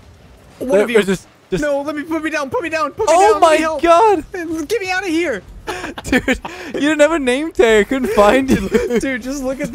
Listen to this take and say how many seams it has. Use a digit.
1